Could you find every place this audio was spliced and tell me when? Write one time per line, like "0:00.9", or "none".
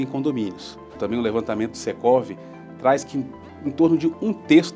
0:01.0